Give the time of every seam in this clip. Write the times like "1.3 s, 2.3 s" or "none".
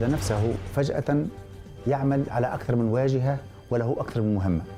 none

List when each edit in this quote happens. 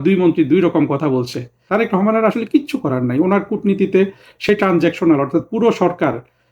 1.5 s

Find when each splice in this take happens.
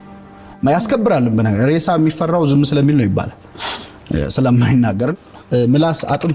5.1 s

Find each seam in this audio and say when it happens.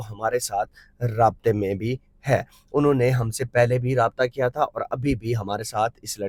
none

